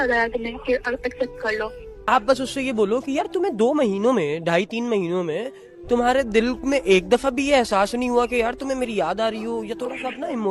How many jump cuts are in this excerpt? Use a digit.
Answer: 1